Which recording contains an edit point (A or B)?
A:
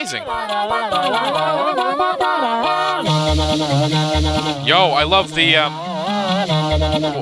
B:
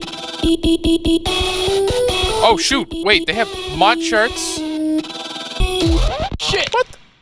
B